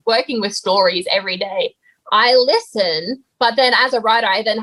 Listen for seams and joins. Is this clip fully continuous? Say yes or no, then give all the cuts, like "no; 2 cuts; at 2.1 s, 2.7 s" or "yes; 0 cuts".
yes; 0 cuts